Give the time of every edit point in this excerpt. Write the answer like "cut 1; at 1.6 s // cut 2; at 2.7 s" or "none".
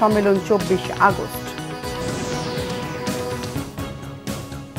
cut 1; at 3.7 s